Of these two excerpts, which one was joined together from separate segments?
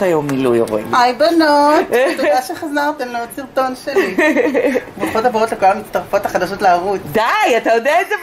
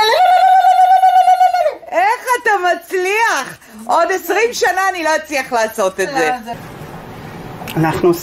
second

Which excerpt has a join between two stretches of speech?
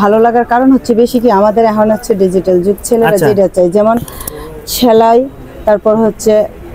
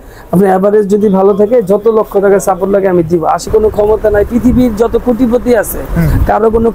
second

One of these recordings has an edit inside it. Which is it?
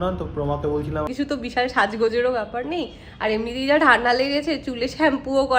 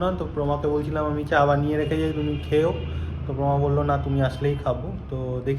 first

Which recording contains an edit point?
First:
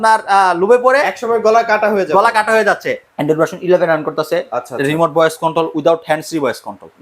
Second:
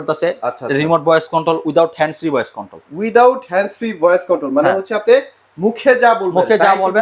first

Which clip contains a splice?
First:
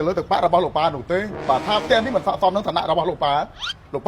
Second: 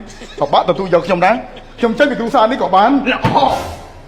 first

